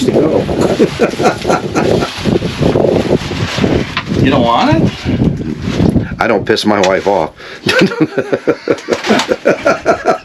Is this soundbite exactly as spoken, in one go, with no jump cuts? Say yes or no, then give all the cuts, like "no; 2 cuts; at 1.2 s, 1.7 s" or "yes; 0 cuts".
yes; 0 cuts